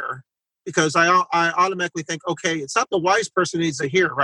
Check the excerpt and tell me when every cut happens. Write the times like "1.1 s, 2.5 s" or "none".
none